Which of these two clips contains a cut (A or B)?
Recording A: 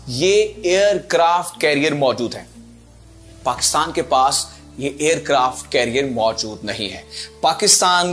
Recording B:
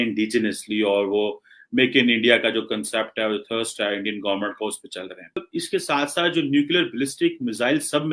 B